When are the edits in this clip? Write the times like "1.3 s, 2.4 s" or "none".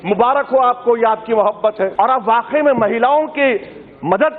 1.9 s